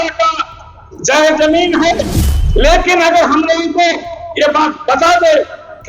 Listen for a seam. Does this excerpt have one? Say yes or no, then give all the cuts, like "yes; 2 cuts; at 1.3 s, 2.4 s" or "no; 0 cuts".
yes; 1 cut; at 2.2 s